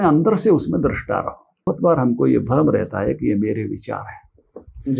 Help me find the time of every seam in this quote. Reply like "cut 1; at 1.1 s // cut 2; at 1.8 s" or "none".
cut 1; at 1.7 s